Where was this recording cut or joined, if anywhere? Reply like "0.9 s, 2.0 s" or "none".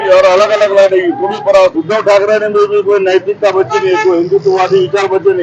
1.8 s